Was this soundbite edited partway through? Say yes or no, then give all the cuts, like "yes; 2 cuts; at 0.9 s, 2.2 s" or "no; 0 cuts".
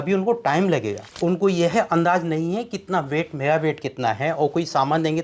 yes; 1 cut; at 1.1 s